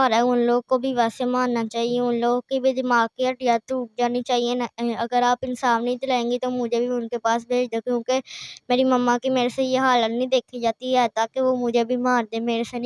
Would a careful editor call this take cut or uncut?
uncut